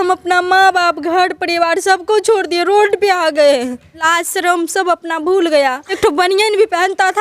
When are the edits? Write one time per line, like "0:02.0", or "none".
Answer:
0:04.0
0:06.0